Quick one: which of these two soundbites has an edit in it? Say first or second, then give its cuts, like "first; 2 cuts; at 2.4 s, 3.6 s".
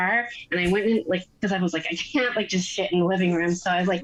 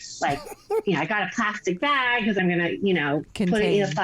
second; 1 cut; at 2.4 s